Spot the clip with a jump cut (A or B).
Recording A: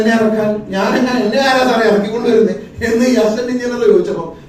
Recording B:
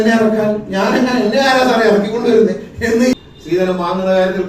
B